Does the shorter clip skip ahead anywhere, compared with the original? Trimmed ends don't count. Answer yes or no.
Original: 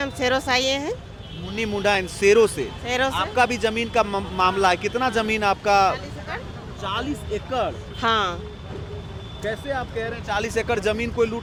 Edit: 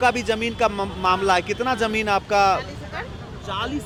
no